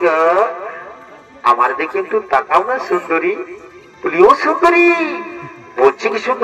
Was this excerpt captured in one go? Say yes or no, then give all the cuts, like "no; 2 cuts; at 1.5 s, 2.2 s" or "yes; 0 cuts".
yes; 0 cuts